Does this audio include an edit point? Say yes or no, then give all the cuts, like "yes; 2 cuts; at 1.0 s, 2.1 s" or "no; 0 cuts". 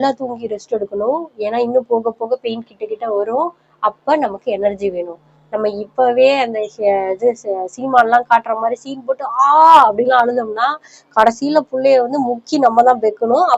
no; 0 cuts